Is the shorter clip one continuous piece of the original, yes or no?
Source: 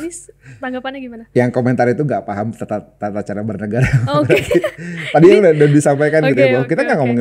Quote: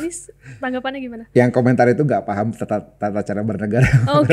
yes